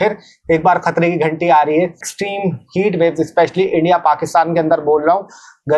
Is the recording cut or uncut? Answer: cut